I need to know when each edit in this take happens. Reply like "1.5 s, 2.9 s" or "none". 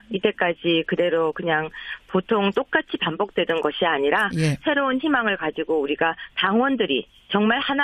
3.8 s